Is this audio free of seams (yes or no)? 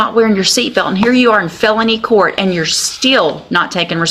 yes